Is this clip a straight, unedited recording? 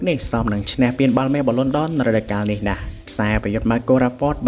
yes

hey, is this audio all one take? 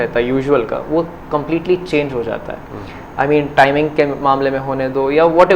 yes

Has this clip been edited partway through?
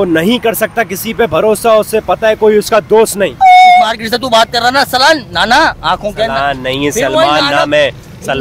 yes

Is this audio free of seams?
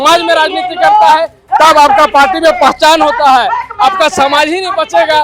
yes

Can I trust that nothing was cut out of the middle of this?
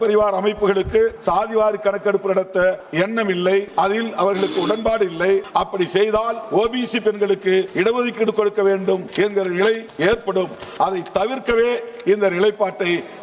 no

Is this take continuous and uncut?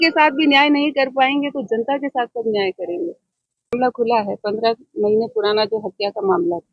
no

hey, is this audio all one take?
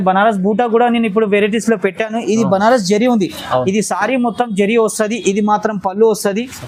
yes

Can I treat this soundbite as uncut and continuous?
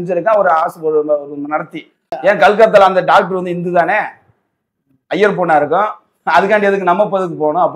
no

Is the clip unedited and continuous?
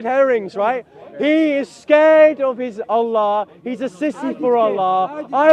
yes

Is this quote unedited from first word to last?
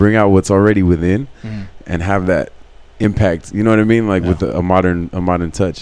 yes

